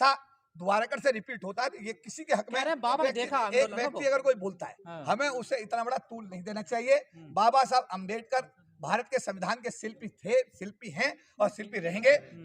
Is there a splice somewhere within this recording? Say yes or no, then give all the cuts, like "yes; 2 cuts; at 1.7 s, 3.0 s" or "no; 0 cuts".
yes; 1 cut; at 3.0 s